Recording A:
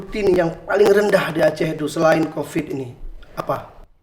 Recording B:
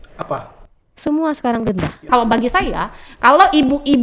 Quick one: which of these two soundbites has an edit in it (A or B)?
B